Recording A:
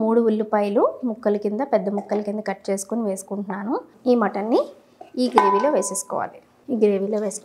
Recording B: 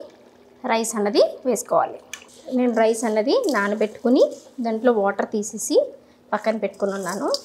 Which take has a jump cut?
A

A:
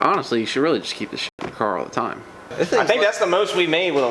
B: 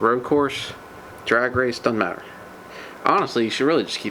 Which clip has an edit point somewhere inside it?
A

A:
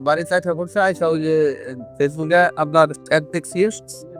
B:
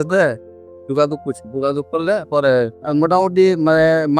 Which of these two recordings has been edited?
B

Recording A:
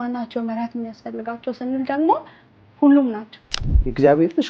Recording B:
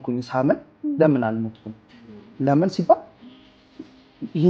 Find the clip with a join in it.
A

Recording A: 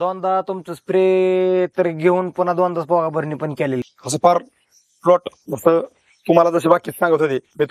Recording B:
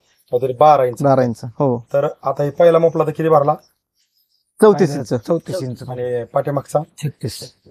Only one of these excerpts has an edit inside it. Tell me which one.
A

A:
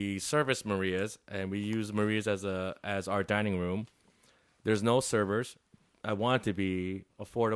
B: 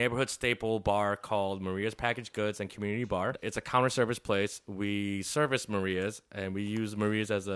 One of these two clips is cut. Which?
B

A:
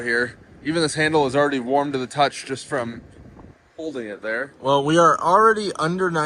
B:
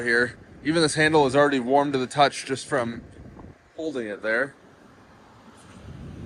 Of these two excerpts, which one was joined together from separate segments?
A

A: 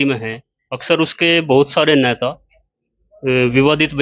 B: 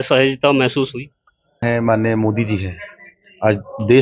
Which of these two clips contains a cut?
B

